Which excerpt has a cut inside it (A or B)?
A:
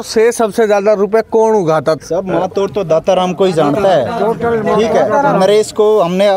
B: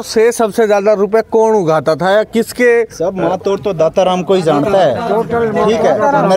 A